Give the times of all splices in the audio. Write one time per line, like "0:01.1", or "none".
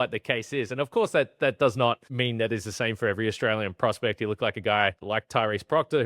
0:02.1
0:05.0